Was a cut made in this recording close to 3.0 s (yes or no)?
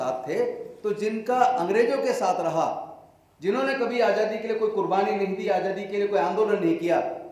no